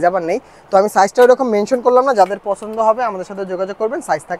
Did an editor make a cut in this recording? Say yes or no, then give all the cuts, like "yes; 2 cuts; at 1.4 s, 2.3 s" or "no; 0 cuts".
no; 0 cuts